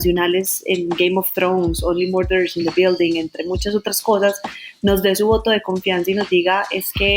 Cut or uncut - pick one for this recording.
uncut